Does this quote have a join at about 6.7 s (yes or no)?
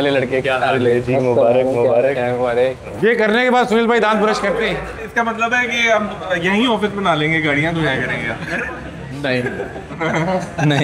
no